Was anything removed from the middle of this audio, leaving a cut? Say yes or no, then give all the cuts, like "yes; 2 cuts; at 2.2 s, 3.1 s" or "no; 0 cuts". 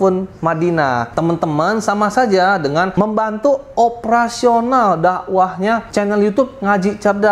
yes; 3 cuts; at 1.1 s, 2.9 s, 5.9 s